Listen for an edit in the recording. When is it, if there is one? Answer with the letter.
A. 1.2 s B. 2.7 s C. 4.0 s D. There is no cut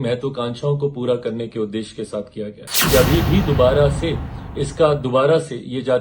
B